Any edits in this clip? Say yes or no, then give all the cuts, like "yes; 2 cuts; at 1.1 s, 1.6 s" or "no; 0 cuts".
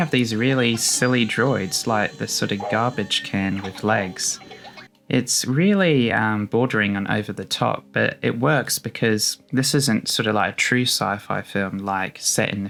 no; 0 cuts